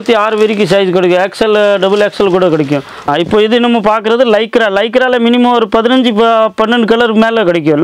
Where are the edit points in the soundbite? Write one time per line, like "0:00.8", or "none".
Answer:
0:02.9